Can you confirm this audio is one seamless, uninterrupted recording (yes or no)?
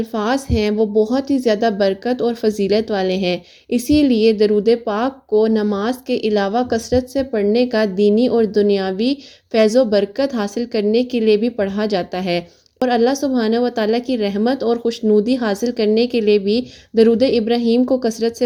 yes